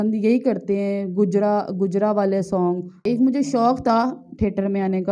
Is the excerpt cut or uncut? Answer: cut